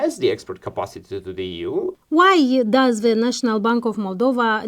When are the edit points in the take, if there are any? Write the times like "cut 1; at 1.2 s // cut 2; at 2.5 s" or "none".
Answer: cut 1; at 2.0 s

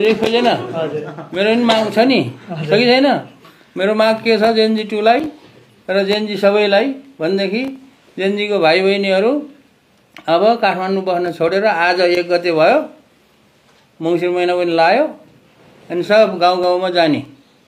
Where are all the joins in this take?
none

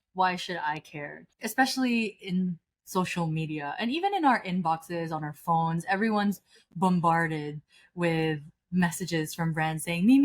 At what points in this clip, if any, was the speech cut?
cut 1; at 1.2 s

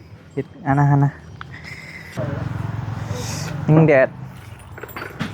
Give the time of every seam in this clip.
cut 1; at 2.2 s

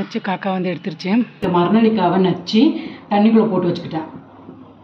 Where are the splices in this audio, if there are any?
cut 1; at 1.4 s

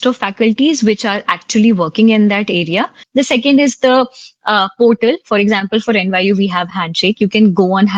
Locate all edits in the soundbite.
cut 1; at 3.0 s

